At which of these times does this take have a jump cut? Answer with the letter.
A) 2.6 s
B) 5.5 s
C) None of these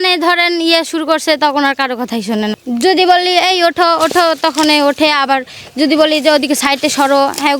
A